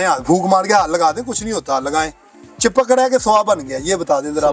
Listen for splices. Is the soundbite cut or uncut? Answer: uncut